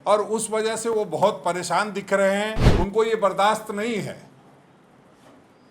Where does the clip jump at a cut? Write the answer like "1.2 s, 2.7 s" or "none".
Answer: 2.6 s

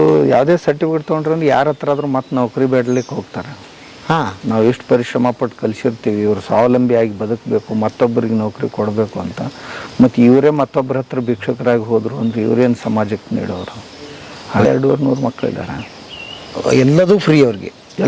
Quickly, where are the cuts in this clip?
14.7 s

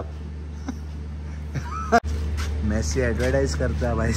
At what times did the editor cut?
2.0 s

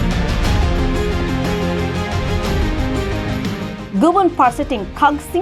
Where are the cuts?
none

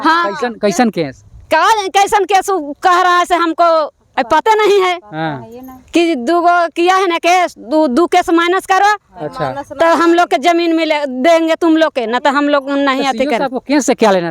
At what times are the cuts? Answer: none

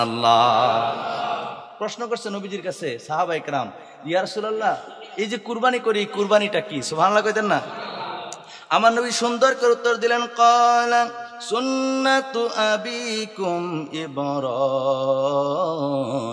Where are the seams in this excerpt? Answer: 1.7 s

